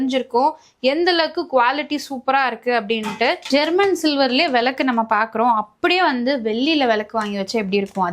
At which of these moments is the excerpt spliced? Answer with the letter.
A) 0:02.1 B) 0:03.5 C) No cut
B